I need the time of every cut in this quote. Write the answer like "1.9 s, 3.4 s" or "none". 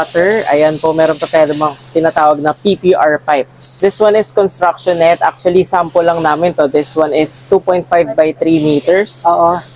3.6 s